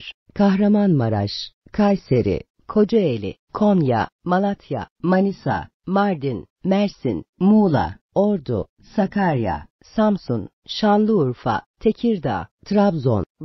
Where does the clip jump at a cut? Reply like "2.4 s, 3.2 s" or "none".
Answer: 12.5 s

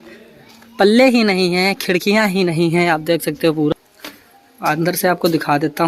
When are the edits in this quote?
3.7 s

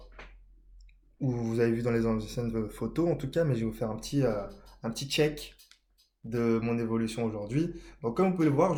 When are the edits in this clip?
none

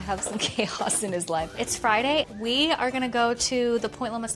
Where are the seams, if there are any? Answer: 1.5 s

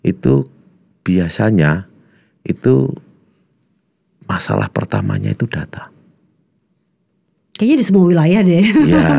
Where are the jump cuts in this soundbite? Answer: none

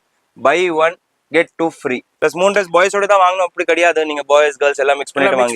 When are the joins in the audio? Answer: 2.1 s

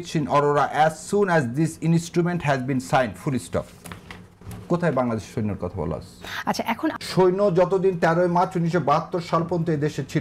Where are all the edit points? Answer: 6.9 s

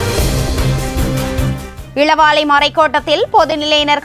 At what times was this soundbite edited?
1.7 s

